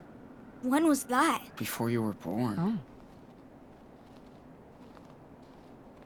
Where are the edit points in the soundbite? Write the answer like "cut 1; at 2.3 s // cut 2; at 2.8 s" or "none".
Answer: none